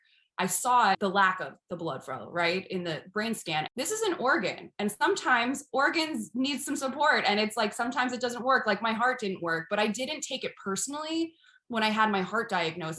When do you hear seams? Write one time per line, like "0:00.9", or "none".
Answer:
0:01.0
0:03.7